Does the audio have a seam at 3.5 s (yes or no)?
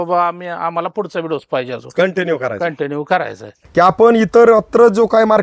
yes